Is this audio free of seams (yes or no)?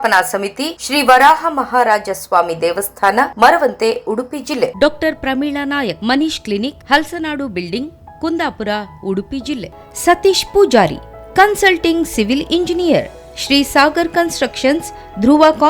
yes